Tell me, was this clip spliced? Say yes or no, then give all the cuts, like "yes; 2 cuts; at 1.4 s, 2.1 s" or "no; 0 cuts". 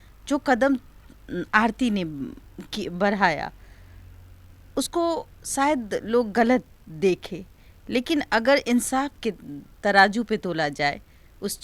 no; 0 cuts